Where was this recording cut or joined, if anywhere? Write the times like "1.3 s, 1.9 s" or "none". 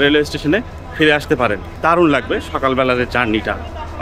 1.7 s